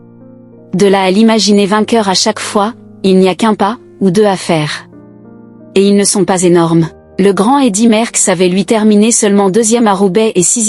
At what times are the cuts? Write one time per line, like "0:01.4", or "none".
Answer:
0:07.0